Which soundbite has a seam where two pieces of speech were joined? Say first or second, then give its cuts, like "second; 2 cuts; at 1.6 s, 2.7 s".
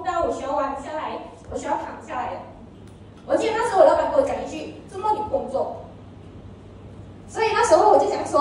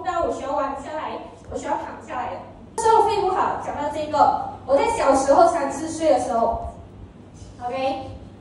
second; 1 cut; at 2.8 s